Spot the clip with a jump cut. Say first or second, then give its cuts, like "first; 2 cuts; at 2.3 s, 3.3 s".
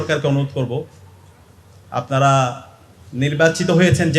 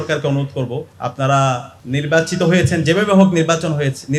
second; 2 cuts; at 0.9 s, 1.7 s